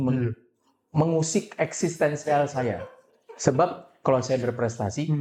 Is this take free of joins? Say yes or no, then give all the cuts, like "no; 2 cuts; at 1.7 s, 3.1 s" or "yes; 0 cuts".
yes; 0 cuts